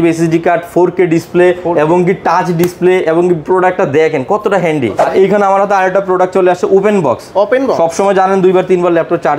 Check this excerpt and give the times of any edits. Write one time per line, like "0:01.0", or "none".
0:05.0